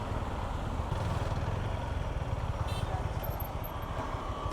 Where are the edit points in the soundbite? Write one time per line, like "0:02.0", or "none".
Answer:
0:00.9